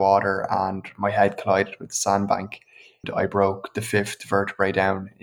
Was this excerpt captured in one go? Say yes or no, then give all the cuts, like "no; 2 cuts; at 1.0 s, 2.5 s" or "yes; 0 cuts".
yes; 0 cuts